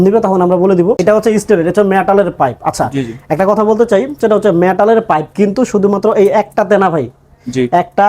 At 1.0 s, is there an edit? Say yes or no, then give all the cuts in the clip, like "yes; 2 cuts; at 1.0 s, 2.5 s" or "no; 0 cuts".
yes; 1 cut; at 1.0 s